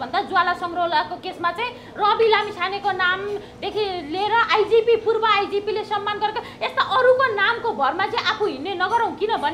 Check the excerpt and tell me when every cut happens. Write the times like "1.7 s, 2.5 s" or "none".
none